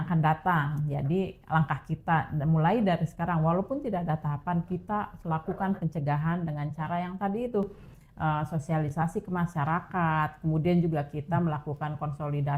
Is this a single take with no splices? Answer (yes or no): yes